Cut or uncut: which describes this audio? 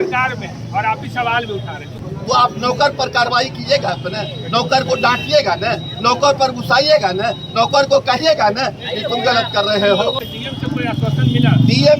cut